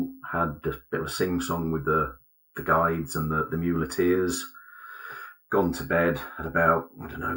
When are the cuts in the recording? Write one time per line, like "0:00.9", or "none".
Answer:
none